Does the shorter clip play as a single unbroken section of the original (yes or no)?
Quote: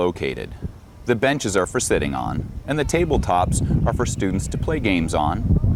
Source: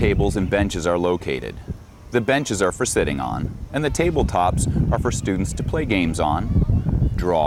yes